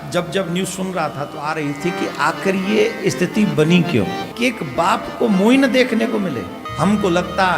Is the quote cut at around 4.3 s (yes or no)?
yes